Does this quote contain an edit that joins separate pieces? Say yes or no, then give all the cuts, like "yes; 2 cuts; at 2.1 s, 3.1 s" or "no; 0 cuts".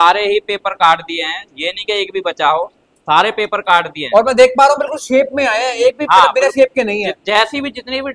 no; 0 cuts